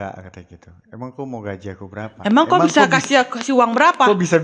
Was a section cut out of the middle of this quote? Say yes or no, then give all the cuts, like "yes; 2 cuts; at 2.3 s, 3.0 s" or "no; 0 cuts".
no; 0 cuts